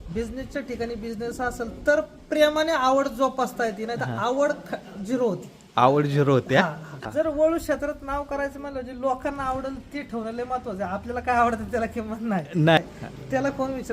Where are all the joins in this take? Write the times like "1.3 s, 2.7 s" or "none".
7.0 s, 12.8 s